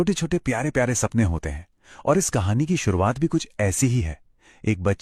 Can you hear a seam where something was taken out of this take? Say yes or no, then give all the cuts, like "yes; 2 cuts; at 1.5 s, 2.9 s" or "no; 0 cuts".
no; 0 cuts